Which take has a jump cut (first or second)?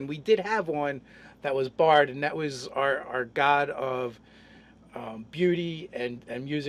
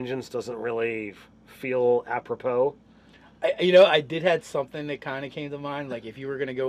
first